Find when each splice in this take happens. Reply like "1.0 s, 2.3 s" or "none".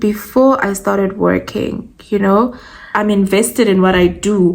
2.8 s